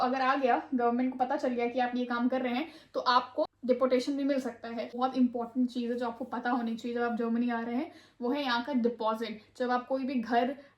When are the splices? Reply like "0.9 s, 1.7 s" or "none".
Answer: 3.5 s, 4.9 s